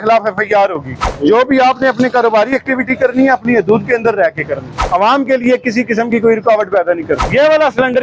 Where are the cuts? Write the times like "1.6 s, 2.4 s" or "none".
1.0 s, 4.7 s, 7.2 s